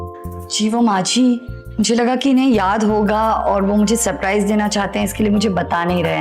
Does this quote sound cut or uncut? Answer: uncut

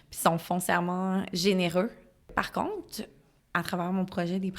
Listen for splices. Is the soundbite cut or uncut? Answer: cut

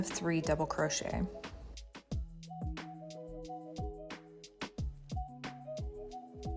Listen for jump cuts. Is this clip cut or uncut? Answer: uncut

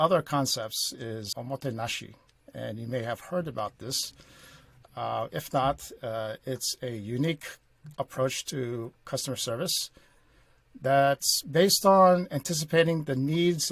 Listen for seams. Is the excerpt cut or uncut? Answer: cut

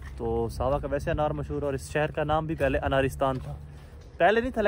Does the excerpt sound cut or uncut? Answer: uncut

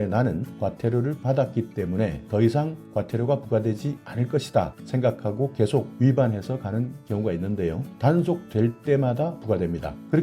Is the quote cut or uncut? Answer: cut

